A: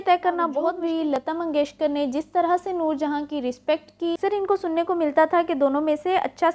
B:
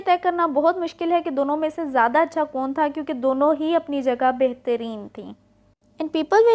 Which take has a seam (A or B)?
A